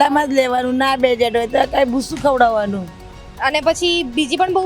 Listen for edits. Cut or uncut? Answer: uncut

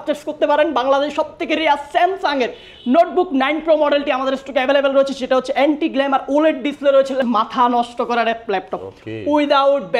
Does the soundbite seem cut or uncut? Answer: cut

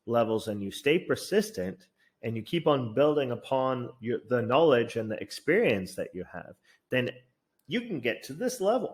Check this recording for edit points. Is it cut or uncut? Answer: uncut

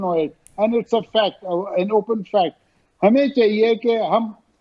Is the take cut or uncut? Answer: cut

